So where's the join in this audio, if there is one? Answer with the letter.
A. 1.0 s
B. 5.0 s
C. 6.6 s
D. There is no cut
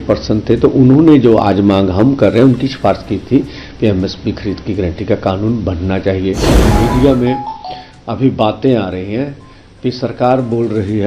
C